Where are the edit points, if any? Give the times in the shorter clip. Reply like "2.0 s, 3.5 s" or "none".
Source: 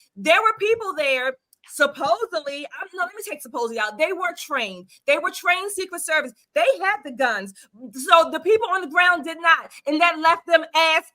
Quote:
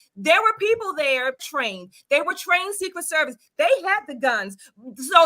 1.5 s